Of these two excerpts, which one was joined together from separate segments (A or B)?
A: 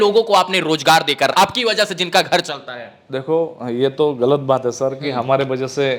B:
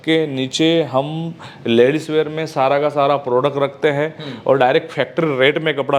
A